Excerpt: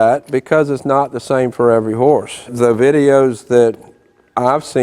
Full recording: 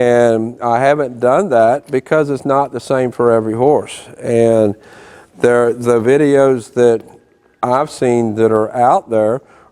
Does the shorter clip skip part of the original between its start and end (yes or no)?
yes